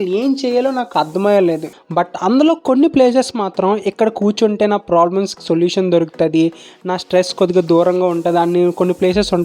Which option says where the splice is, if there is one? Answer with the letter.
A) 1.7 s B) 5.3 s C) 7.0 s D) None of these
A